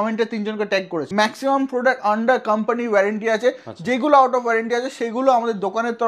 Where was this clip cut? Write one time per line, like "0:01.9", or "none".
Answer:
0:01.0